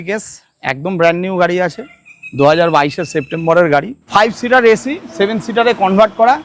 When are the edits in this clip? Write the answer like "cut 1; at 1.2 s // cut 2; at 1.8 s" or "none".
cut 1; at 4.0 s